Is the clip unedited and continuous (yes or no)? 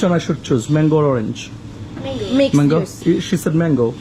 no